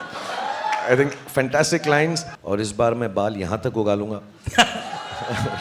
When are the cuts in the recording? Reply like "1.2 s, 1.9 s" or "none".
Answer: 2.3 s